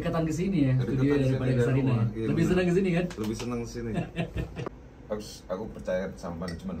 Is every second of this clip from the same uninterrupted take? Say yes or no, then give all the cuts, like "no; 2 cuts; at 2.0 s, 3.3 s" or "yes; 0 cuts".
no; 1 cut; at 4.7 s